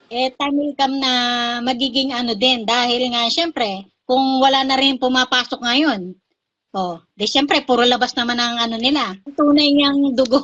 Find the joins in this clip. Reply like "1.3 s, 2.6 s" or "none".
9.2 s